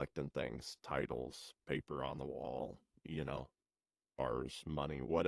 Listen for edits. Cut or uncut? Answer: cut